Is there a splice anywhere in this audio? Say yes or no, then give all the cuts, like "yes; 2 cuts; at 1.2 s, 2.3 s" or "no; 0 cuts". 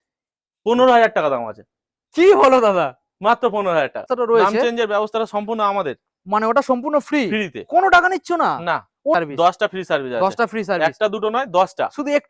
yes; 2 cuts; at 4.0 s, 9.2 s